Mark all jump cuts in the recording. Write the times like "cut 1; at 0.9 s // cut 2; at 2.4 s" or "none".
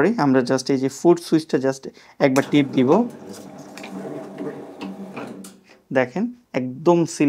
cut 1; at 6.4 s